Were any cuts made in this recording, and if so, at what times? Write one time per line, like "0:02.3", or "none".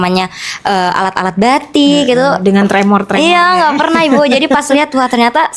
none